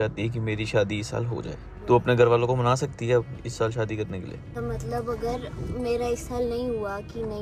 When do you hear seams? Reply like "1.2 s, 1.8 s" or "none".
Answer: 1.7 s, 4.5 s

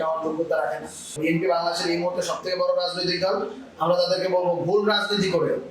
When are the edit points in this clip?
1.2 s

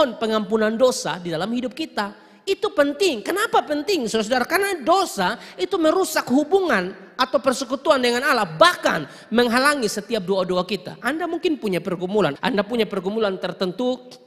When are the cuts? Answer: 12.4 s

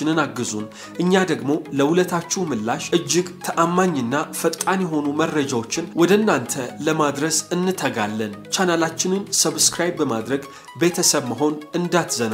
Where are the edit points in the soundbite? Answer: 8.4 s

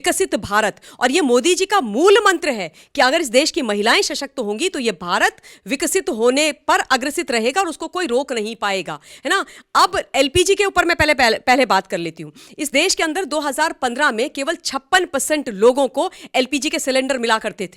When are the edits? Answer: none

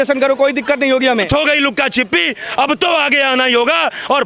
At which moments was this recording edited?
1.3 s

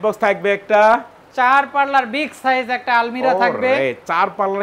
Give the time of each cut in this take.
none

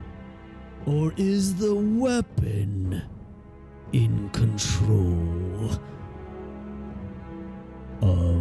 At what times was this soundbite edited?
5.8 s, 7.7 s

